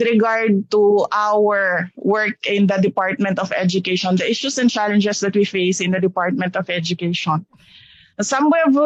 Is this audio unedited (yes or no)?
yes